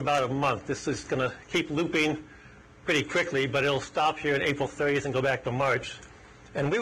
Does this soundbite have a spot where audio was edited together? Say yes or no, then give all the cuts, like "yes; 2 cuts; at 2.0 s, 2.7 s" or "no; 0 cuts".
no; 0 cuts